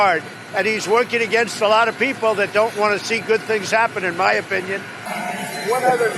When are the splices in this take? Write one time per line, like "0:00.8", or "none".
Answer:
0:05.1